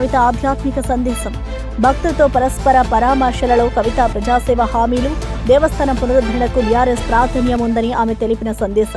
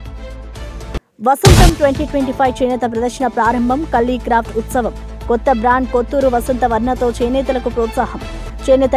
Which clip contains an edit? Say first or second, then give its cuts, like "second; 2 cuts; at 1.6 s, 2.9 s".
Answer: second; 1 cut; at 0.9 s